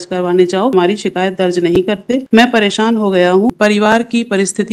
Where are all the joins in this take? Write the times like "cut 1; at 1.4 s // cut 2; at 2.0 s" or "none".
cut 1; at 0.7 s // cut 2; at 2.2 s // cut 3; at 3.5 s